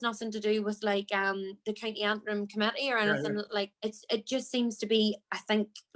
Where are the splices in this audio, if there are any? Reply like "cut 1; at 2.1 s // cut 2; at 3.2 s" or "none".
cut 1; at 3.7 s